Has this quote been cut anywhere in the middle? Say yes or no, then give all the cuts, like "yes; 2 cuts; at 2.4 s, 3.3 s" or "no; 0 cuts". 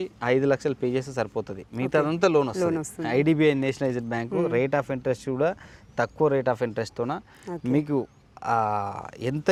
no; 0 cuts